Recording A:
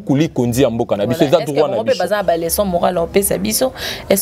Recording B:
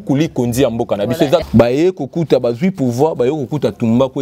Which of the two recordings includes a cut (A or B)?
B